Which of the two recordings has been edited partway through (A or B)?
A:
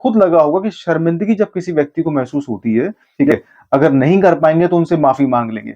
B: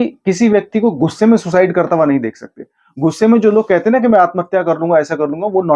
A